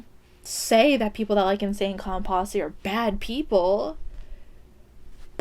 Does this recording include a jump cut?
no; 0 cuts

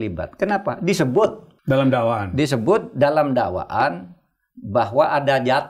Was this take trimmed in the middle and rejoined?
no; 0 cuts

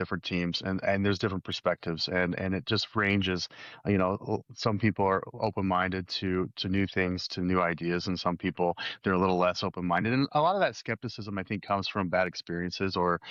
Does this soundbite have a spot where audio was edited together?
no; 0 cuts

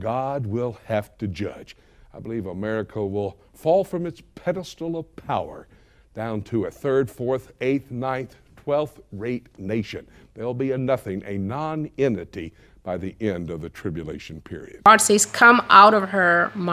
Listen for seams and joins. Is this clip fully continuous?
no; 1 cut; at 14.9 s

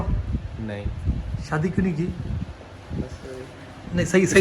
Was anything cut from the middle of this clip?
yes; 1 cut; at 1.0 s

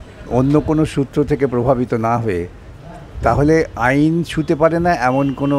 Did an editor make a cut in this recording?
no; 0 cuts

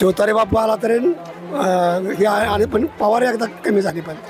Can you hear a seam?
no; 0 cuts

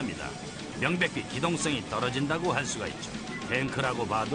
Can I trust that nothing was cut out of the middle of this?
yes; 0 cuts

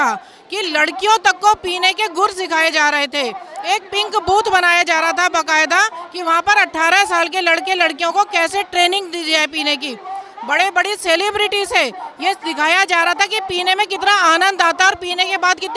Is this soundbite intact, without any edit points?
yes; 0 cuts

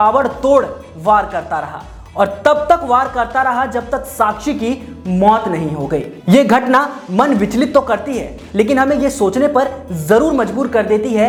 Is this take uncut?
yes; 0 cuts

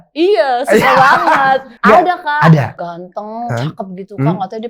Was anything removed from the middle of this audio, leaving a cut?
yes; 2 cuts; at 1.7 s, 2.8 s

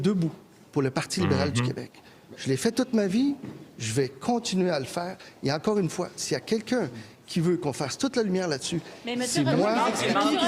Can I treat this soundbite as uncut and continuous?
yes; 0 cuts

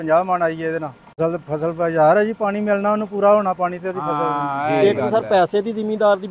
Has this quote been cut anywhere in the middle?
yes; 2 cuts; at 1.2 s, 4.8 s

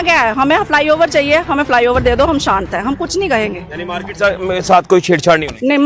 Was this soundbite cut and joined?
no; 0 cuts

